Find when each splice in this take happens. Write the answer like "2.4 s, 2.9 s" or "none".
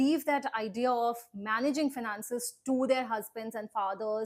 none